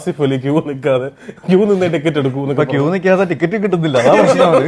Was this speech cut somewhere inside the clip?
no; 0 cuts

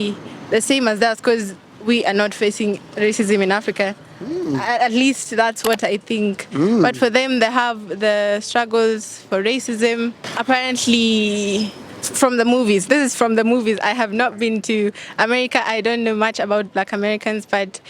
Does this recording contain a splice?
no; 0 cuts

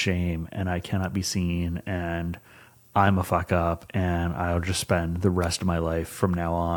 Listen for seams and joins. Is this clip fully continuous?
yes; 0 cuts

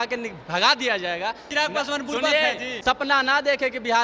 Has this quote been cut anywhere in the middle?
yes; 2 cuts; at 1.5 s, 3.0 s

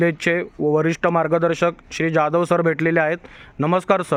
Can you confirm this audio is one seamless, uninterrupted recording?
yes; 0 cuts

